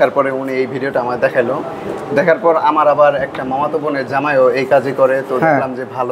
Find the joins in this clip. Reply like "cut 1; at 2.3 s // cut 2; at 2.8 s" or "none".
none